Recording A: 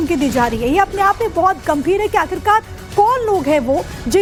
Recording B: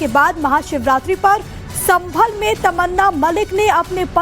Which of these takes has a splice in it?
B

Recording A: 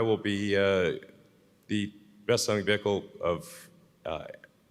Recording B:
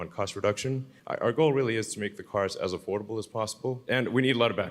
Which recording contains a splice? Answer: B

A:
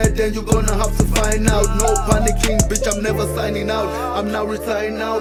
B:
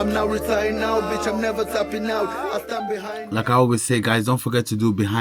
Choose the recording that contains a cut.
B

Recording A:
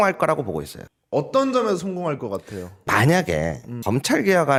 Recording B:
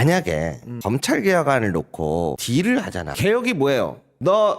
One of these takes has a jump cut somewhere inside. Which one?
B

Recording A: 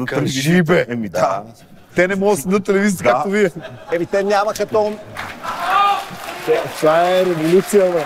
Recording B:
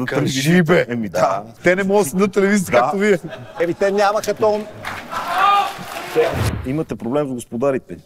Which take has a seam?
B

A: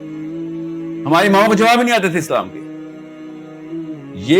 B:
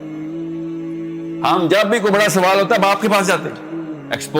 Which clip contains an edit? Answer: B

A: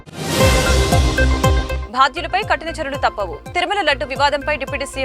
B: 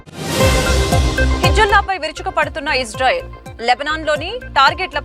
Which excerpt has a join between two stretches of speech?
B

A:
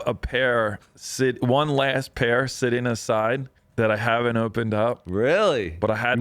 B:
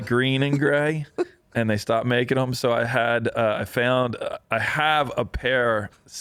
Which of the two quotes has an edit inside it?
A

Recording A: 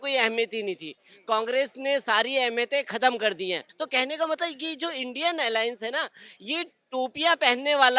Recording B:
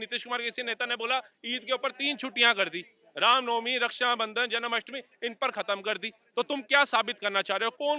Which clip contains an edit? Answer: A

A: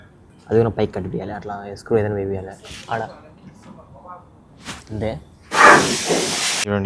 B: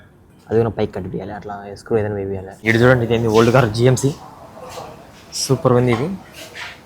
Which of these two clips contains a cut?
B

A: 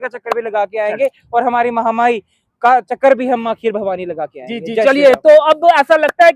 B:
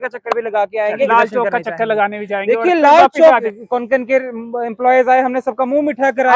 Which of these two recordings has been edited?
B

